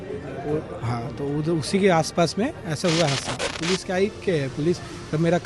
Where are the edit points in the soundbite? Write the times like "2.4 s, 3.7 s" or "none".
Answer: 3.5 s